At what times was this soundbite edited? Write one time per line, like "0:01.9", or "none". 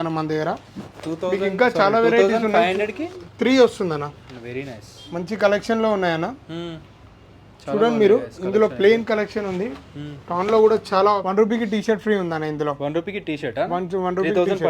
0:11.2

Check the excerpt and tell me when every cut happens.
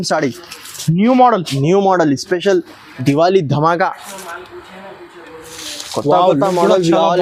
none

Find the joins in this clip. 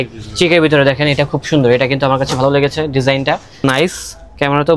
0:03.6

